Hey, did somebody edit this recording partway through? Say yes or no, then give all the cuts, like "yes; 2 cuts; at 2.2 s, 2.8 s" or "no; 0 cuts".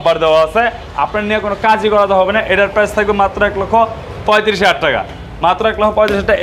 no; 0 cuts